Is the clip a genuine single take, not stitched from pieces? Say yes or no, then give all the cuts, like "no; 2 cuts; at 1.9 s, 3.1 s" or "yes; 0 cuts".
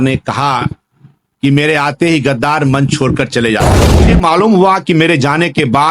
no; 1 cut; at 4.0 s